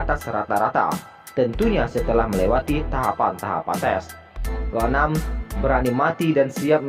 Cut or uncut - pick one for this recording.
uncut